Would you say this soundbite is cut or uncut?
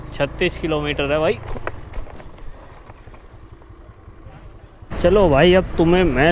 cut